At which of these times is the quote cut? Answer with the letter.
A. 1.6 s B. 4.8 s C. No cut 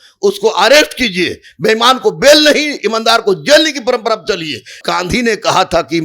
B